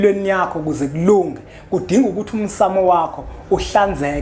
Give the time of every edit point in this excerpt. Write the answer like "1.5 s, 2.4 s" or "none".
none